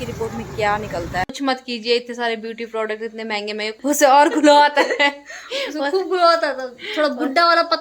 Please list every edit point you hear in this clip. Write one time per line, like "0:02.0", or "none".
0:01.3
0:03.7